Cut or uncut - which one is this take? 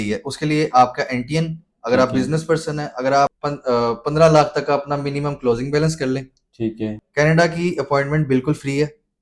cut